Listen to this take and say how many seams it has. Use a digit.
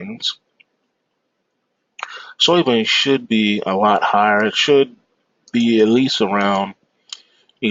0